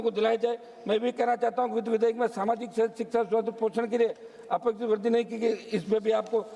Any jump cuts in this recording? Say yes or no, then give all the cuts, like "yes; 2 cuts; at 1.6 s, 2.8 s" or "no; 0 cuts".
no; 0 cuts